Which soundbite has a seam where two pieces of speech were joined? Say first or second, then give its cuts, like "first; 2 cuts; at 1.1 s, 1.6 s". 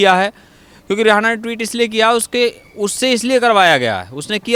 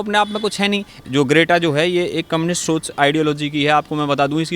second; 1 cut; at 0.9 s